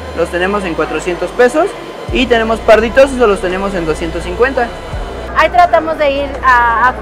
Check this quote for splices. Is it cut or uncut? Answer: cut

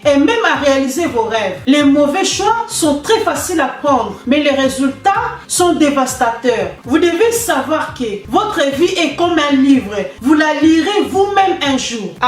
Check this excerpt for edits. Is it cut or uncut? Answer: cut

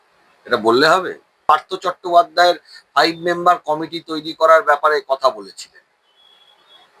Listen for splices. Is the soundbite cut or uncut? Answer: cut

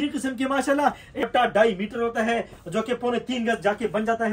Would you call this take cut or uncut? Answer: cut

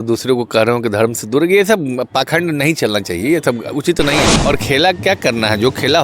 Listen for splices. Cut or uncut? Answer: cut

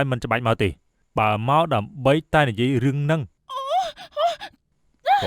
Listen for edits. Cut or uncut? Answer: cut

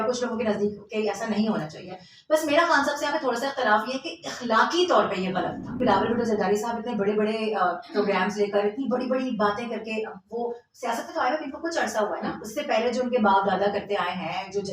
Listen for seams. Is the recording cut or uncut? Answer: cut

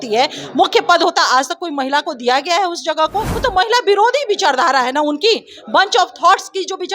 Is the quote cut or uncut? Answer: cut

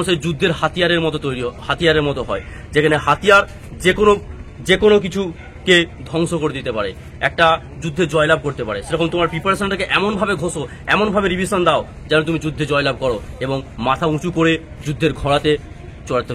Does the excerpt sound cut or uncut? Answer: uncut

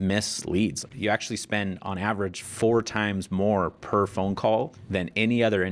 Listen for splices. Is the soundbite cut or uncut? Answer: cut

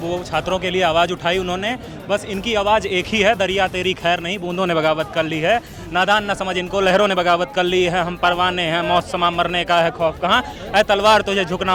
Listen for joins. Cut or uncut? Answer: uncut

